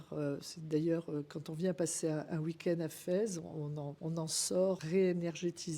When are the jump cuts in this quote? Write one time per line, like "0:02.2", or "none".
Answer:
0:03.9
0:04.8